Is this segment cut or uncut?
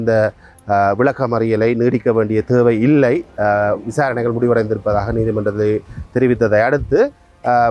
uncut